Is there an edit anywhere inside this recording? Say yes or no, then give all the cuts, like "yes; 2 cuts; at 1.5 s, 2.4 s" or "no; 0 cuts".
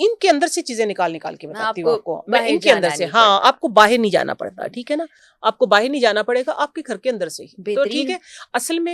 no; 0 cuts